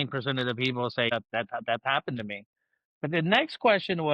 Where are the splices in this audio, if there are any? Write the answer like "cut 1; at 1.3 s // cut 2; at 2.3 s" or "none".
cut 1; at 1.1 s